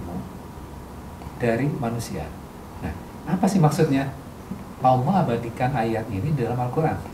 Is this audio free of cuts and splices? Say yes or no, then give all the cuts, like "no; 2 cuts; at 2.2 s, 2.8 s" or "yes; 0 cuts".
no; 1 cut; at 4.8 s